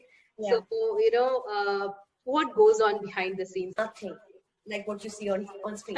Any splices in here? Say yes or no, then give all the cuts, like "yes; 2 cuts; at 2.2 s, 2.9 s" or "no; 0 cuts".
yes; 1 cut; at 3.8 s